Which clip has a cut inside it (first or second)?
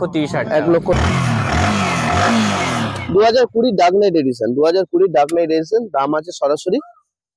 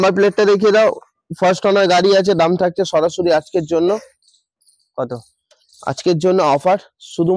first